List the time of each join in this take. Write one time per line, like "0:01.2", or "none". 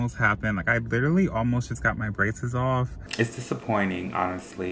0:03.0